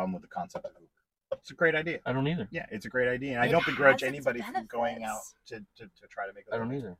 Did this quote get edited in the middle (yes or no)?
no